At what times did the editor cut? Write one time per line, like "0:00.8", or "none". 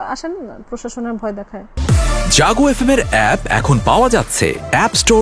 0:01.7